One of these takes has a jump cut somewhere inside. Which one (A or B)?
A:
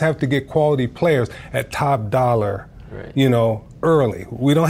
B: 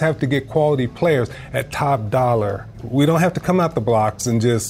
B